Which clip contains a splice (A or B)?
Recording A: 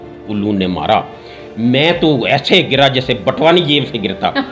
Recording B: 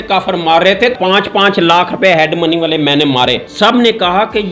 B